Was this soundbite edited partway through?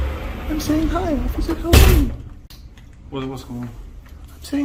no; 0 cuts

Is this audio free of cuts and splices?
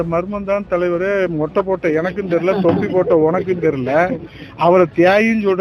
yes; 0 cuts

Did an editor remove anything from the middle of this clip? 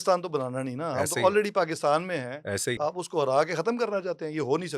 yes; 1 cut; at 2.7 s

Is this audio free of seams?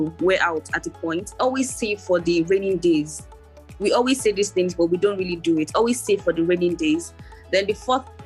no; 1 cut; at 1.3 s

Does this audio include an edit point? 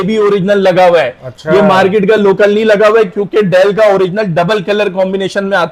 no; 0 cuts

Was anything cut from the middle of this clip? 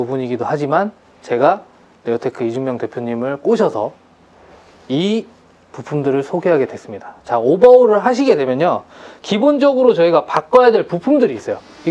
no; 0 cuts

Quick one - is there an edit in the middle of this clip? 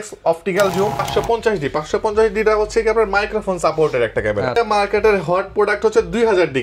yes; 2 cuts; at 1.0 s, 4.6 s

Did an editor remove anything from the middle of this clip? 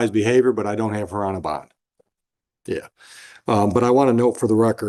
no; 0 cuts

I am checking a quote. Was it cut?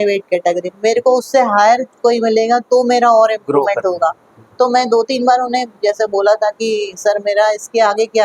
no; 0 cuts

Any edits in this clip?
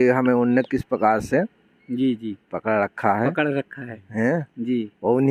no; 0 cuts

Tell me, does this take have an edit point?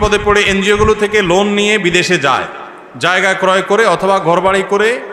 no; 0 cuts

